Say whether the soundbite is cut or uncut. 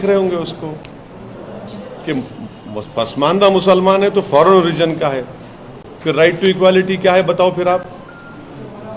uncut